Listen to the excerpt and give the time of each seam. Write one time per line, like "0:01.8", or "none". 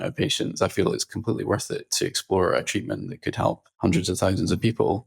0:03.7